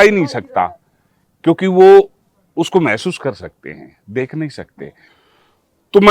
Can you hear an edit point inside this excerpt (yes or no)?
yes